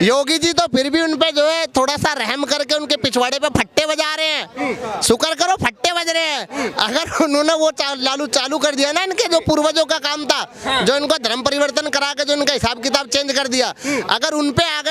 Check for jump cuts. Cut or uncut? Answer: uncut